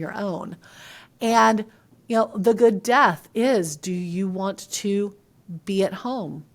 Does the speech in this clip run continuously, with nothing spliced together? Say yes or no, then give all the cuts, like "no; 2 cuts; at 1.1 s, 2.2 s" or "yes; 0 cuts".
yes; 0 cuts